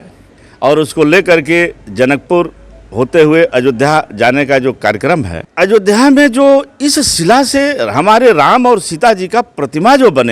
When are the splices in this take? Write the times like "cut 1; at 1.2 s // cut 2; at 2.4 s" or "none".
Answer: cut 1; at 5.4 s